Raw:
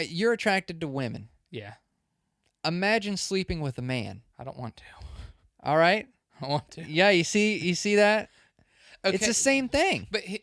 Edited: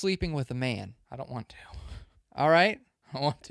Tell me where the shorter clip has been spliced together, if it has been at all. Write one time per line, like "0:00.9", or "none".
none